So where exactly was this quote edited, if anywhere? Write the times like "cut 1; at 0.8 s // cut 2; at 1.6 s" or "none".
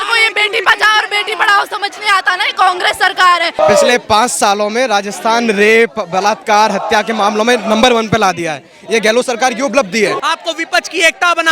cut 1; at 3.6 s // cut 2; at 10.2 s